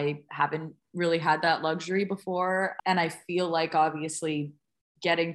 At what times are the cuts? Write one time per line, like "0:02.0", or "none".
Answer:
0:02.7